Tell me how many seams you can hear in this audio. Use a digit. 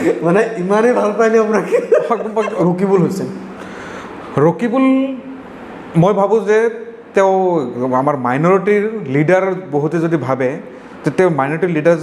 1